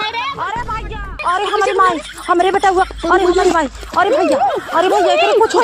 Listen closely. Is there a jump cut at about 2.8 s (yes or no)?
no